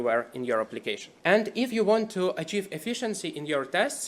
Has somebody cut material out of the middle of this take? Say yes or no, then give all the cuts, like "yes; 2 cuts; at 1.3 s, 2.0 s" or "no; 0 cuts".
yes; 1 cut; at 1.1 s